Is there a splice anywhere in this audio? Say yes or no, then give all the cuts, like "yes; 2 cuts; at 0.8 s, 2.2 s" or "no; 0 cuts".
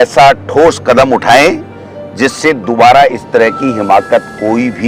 no; 0 cuts